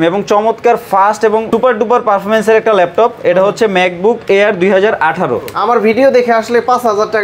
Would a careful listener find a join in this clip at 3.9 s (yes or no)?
no